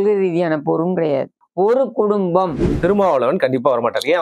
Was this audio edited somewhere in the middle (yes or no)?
yes